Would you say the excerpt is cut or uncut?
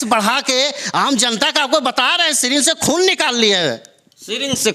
uncut